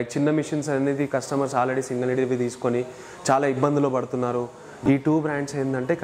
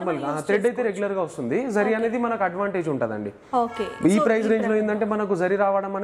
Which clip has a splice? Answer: first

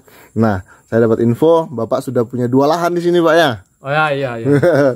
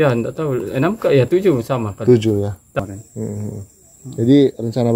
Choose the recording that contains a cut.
second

